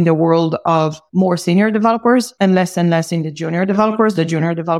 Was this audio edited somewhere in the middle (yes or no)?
yes